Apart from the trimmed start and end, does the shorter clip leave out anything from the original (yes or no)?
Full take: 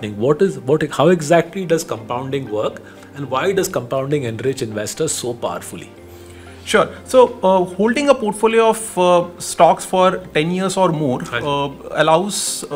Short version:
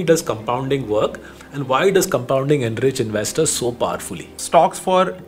yes